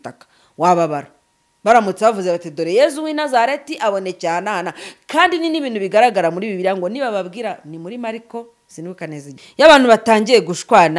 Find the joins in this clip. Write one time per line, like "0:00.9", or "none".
0:09.4

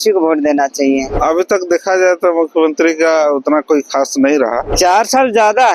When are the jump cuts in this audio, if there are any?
0:01.1
0:04.7

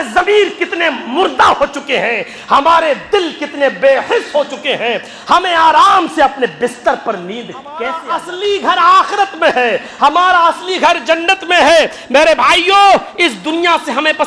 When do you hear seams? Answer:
0:08.0

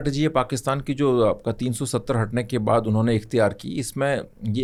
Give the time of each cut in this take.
none

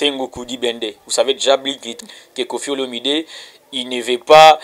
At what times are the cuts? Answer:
0:01.8

